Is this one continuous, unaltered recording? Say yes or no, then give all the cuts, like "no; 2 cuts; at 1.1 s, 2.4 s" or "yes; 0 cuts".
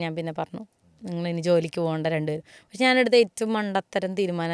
yes; 0 cuts